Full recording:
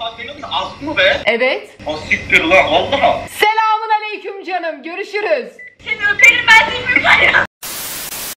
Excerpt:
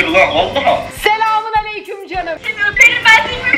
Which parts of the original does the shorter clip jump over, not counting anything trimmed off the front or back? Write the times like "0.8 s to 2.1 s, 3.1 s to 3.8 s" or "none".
4.8 s to 5.9 s